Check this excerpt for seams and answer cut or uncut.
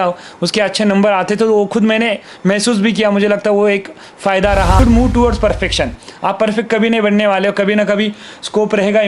cut